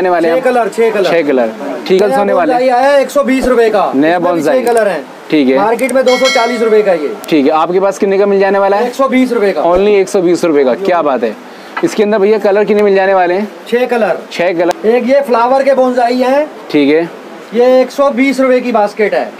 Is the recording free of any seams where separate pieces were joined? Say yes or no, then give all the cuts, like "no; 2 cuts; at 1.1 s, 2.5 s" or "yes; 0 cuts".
no; 2 cuts; at 2.0 s, 14.7 s